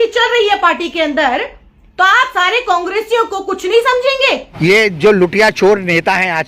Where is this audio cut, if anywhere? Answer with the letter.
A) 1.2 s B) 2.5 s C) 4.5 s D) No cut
C